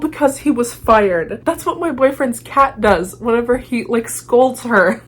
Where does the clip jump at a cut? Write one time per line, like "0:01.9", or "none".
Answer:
0:01.4